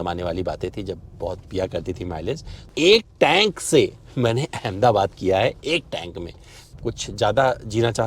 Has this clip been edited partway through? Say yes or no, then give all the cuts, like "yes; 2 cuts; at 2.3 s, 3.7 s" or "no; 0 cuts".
yes; 2 cuts; at 2.7 s, 6.7 s